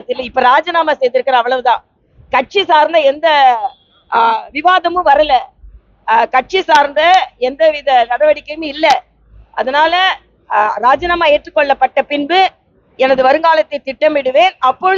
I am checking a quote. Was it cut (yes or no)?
no